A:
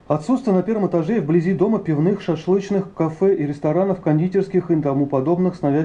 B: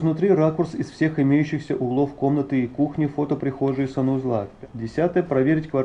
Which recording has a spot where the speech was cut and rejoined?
B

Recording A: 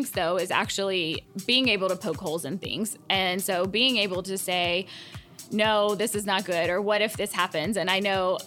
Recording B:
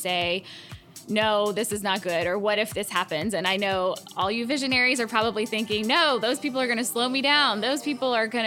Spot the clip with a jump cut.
A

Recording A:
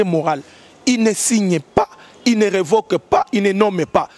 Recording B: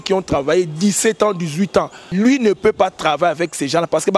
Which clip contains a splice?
B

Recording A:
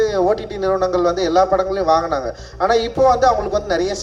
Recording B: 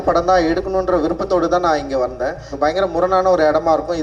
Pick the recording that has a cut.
B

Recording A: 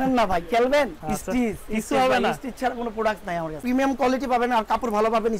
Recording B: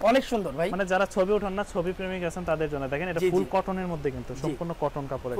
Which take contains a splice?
A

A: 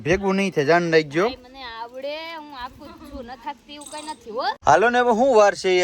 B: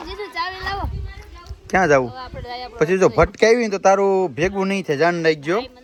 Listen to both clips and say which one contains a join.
A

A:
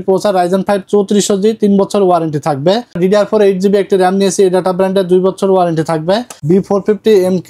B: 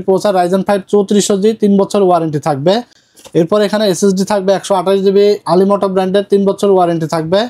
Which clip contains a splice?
A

